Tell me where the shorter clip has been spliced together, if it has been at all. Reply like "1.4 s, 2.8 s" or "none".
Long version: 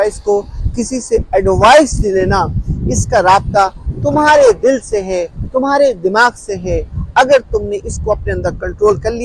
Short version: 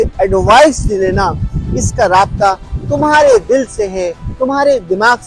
none